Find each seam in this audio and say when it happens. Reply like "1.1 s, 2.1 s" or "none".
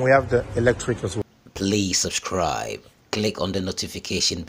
1.2 s